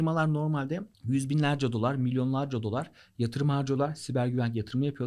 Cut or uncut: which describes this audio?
cut